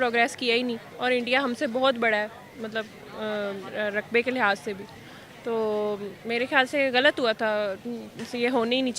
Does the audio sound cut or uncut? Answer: uncut